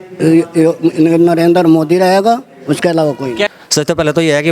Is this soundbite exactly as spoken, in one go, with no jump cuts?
no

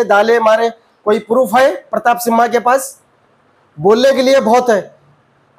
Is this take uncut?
yes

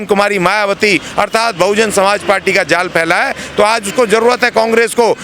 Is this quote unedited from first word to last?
yes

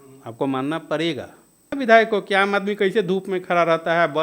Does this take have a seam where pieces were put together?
yes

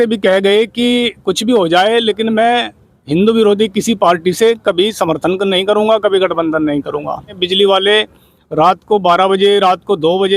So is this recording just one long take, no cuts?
no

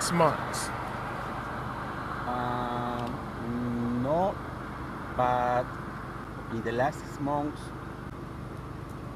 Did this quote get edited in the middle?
yes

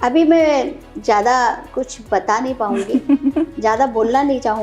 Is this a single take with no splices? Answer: yes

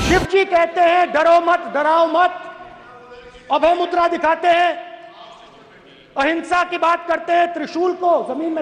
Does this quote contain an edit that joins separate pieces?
no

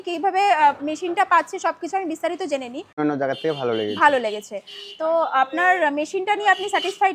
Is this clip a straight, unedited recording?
no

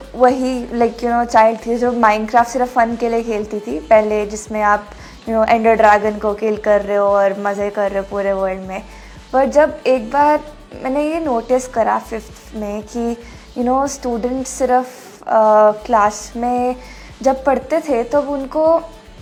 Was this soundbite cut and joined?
no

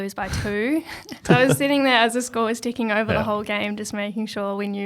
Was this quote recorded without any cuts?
no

